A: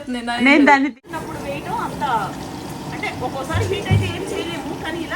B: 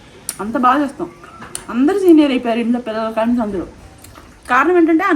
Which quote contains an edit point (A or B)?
A